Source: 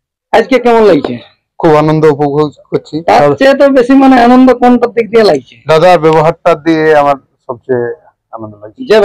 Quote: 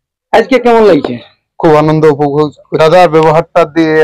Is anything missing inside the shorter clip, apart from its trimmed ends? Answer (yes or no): yes